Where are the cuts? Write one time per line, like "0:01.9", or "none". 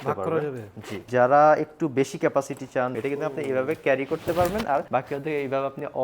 0:01.0
0:02.9
0:04.9